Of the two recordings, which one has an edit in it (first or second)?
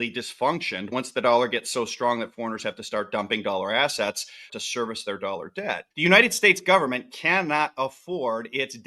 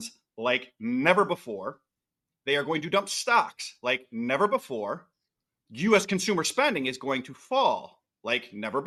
first